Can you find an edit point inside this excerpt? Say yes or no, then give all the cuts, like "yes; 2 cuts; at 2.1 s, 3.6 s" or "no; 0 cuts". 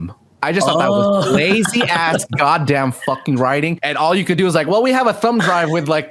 yes; 1 cut; at 3.8 s